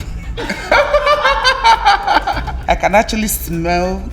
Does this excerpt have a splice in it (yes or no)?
yes